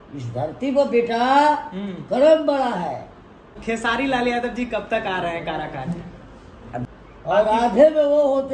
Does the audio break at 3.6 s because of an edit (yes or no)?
yes